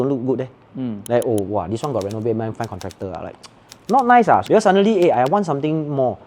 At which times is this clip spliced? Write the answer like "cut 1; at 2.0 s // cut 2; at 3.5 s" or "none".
cut 1; at 2.5 s // cut 2; at 4.4 s

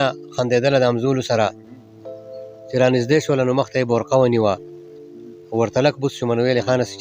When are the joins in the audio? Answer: none

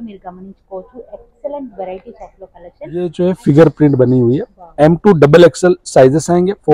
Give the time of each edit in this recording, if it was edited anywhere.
cut 1; at 3.1 s

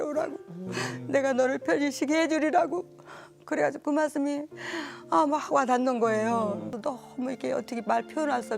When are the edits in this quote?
cut 1; at 6.8 s

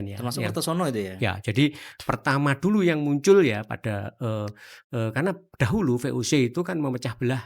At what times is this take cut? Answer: none

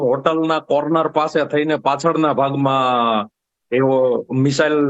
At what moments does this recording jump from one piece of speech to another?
none

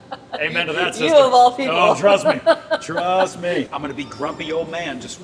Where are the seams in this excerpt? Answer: cut 1; at 3.7 s

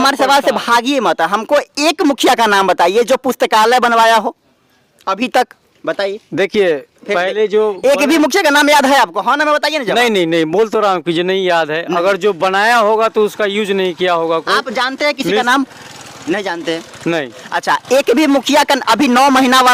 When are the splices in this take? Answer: none

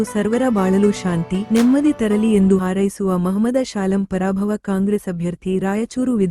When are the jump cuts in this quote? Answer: cut 1; at 2.6 s

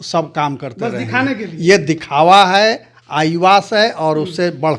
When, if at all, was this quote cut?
none

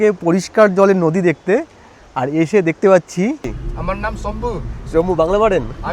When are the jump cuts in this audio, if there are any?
cut 1; at 3.5 s

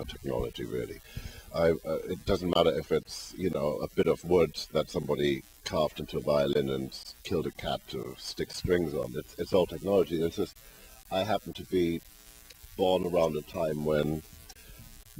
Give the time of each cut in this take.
none

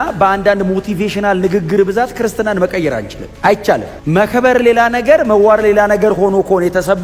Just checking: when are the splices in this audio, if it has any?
none

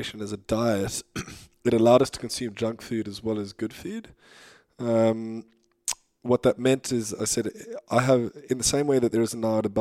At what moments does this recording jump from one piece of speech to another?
none

